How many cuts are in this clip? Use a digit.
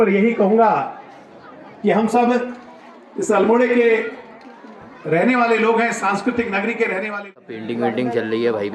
1